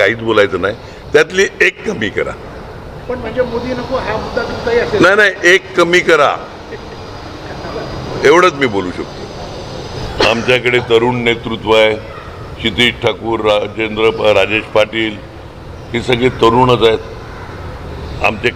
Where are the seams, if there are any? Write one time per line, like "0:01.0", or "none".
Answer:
0:10.0